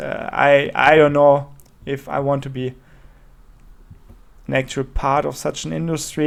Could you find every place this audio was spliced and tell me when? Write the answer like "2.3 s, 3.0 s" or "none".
none